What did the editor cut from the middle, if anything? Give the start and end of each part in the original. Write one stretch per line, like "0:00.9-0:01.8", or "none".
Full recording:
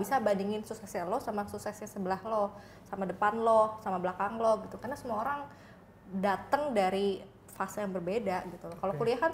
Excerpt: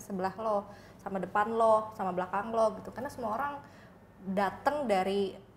none